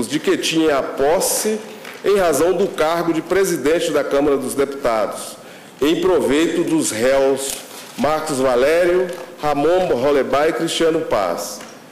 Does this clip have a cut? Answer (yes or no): no